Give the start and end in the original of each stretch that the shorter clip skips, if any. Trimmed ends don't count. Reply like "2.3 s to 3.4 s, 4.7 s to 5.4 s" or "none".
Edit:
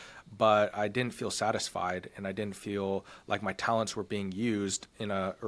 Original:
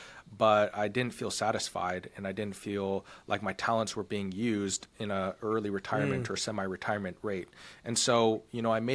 none